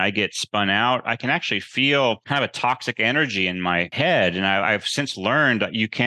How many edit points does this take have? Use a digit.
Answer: 2